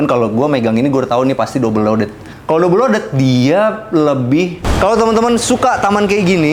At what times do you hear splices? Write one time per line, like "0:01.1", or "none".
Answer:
0:02.3
0:04.6